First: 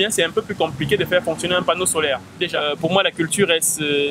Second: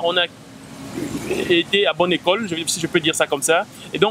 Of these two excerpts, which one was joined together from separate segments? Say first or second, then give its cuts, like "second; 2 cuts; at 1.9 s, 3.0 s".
first; 1 cut; at 2.6 s